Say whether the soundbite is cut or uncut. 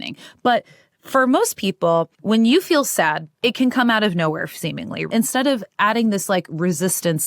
cut